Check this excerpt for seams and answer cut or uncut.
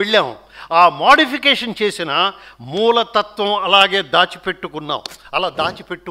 uncut